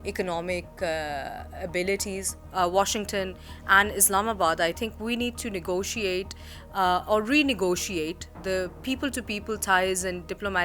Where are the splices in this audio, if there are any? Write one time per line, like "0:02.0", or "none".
0:02.4